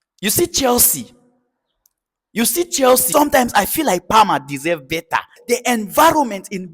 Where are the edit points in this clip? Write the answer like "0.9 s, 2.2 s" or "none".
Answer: 3.1 s, 5.3 s